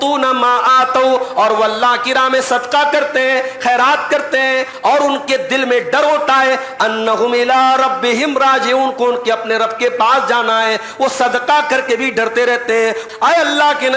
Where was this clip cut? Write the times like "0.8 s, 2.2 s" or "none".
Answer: 4.7 s, 13.0 s